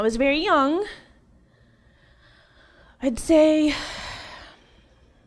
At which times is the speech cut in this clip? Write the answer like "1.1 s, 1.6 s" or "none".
2.5 s